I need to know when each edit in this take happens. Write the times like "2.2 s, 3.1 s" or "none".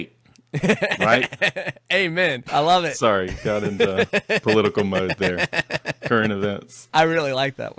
2.4 s, 6.7 s